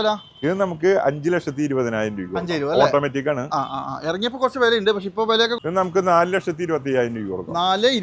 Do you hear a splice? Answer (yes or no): yes